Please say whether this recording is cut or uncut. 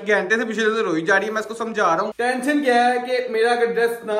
cut